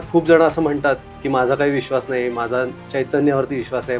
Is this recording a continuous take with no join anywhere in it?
yes; 0 cuts

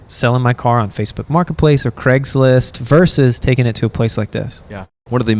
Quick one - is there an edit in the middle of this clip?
no; 0 cuts

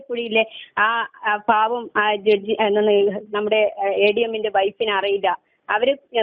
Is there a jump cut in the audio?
no; 0 cuts

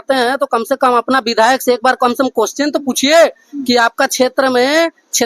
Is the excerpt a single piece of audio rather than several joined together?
yes; 0 cuts

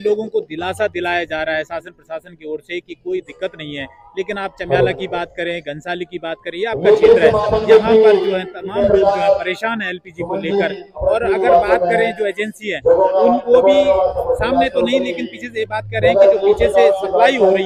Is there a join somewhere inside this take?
no; 0 cuts

